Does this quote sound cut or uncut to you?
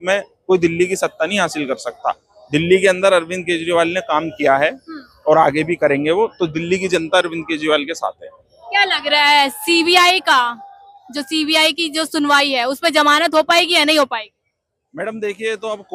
uncut